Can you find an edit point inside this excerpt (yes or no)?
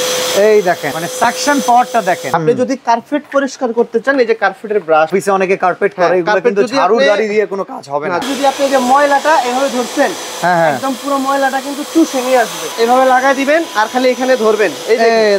yes